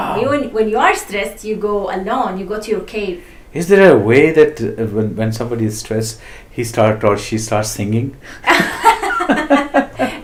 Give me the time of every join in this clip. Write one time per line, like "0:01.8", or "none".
none